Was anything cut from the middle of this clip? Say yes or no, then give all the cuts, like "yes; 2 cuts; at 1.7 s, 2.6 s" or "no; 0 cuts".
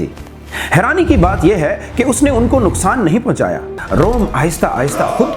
yes; 1 cut; at 3.7 s